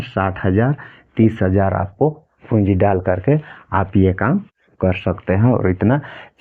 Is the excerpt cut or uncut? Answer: uncut